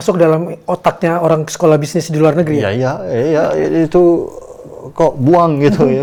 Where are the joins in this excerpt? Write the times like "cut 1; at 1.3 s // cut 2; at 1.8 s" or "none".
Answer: none